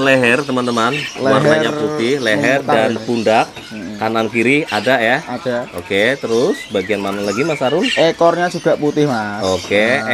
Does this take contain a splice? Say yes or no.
no